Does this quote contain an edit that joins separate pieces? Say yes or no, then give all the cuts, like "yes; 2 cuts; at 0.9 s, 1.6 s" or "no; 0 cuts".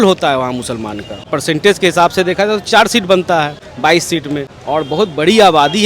yes; 3 cuts; at 1.3 s, 3.6 s, 4.5 s